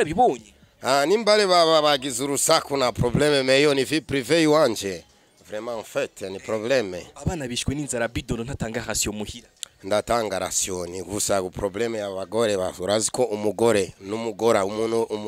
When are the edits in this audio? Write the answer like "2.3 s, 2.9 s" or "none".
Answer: none

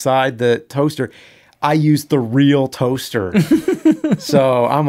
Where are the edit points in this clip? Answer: none

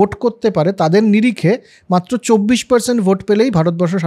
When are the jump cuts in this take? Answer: none

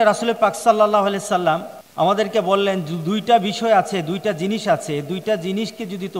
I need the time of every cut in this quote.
1.8 s

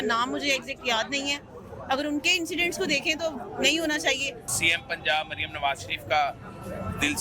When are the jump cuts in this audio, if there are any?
4.4 s

